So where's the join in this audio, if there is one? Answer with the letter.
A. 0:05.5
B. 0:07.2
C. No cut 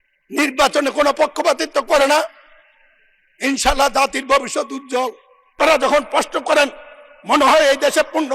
A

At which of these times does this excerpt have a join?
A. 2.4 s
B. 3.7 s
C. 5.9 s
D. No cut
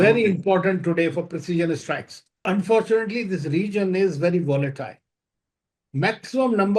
A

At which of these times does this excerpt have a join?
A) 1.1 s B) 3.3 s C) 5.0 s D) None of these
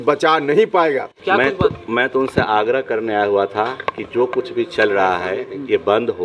A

